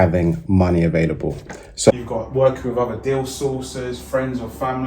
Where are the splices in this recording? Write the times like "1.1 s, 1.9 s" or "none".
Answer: 1.9 s